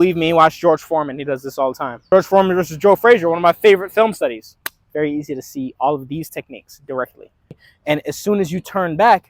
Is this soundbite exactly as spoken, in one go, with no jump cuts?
no; 2 cuts; at 2.1 s, 7.7 s

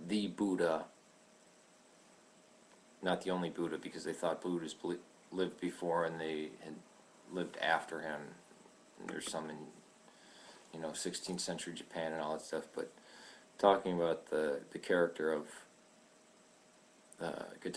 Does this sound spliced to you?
no; 0 cuts

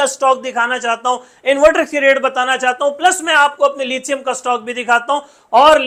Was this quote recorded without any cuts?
yes; 0 cuts

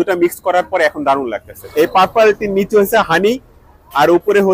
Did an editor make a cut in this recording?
yes; 1 cut; at 1.6 s

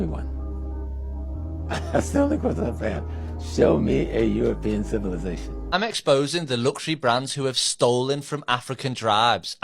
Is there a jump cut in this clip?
yes; 1 cut; at 5.5 s

